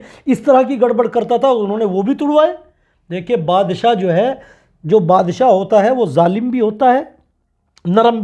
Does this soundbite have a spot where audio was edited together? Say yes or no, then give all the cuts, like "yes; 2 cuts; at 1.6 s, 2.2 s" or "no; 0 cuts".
no; 0 cuts